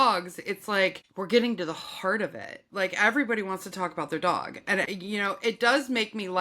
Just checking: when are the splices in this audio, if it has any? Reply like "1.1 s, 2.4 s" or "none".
1.1 s, 4.9 s